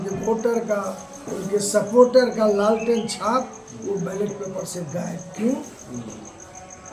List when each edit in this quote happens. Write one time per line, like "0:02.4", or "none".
none